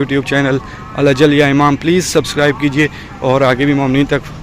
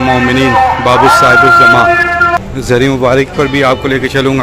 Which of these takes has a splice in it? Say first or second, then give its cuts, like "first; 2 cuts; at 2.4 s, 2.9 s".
second; 1 cut; at 2.4 s